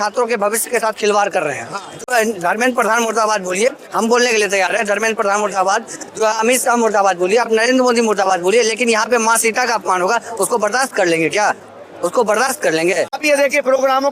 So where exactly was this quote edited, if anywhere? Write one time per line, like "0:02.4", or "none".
0:02.0
0:13.2